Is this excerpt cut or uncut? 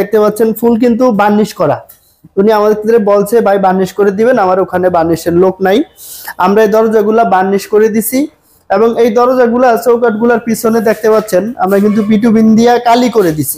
uncut